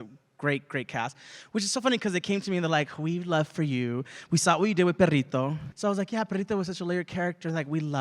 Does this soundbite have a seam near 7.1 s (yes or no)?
no